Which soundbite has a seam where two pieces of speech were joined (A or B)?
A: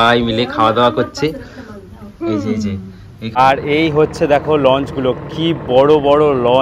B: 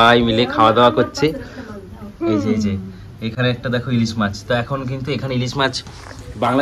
A